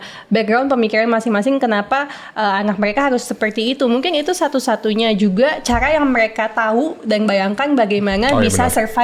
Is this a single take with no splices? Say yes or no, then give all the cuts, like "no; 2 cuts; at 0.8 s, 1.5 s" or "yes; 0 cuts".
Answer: yes; 0 cuts